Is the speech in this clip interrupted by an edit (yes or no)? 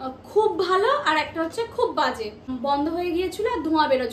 yes